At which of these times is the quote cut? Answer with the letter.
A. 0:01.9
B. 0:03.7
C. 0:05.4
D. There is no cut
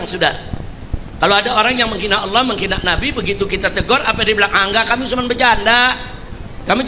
D